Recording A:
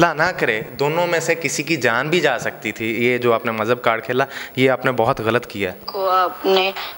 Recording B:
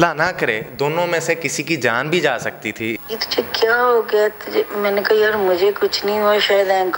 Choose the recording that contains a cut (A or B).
B